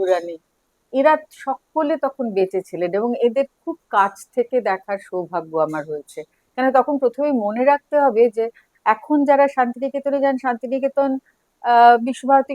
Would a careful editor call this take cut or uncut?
uncut